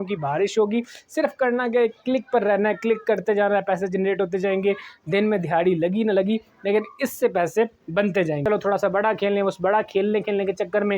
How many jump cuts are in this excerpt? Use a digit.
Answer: 1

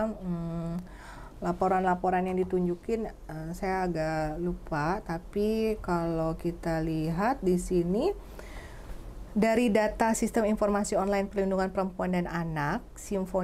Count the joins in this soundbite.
0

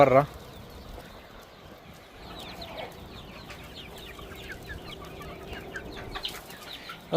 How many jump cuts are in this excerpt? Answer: 1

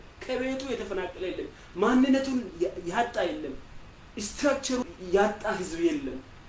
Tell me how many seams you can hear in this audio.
1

